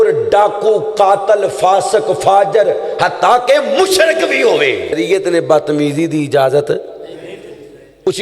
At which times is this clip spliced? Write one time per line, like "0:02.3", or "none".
0:05.0